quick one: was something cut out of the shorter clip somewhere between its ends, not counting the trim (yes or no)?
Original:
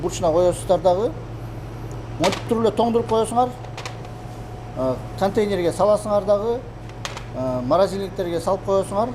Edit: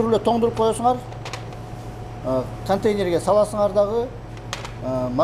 no